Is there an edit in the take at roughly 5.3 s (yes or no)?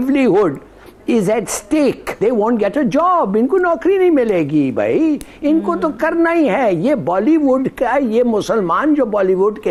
no